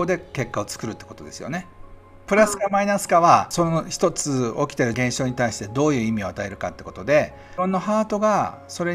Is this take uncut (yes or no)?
no